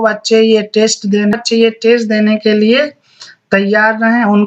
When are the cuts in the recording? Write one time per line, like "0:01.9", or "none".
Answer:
0:01.4